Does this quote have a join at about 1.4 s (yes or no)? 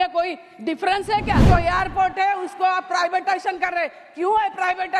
yes